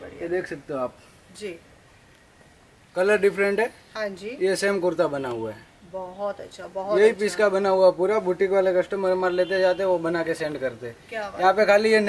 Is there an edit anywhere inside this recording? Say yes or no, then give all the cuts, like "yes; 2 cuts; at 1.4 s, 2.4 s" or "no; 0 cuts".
no; 0 cuts